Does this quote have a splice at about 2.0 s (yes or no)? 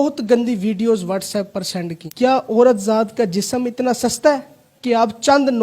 yes